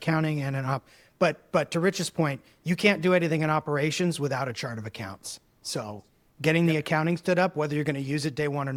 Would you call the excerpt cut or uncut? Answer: uncut